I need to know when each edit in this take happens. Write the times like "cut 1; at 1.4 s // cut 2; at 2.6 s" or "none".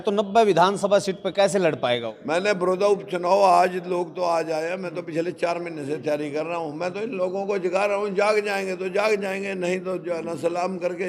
cut 1; at 2.1 s